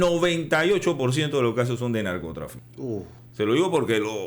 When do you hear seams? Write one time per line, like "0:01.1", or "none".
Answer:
0:03.0